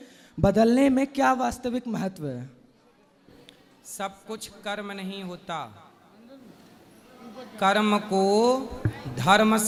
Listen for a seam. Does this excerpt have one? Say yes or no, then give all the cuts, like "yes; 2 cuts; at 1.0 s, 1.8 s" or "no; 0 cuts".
no; 0 cuts